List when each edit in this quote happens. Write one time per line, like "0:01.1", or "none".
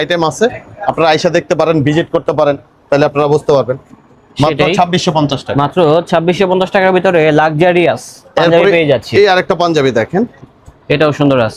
none